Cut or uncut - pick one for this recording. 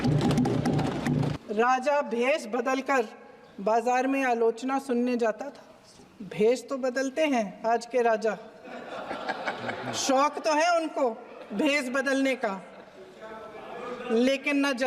cut